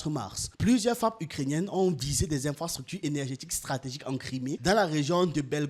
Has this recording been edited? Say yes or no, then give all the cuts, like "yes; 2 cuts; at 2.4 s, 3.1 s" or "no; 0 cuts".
no; 0 cuts